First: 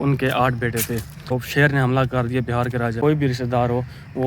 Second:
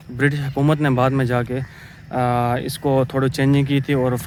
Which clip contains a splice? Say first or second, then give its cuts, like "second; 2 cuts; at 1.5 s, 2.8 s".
first; 2 cuts; at 1.4 s, 3.0 s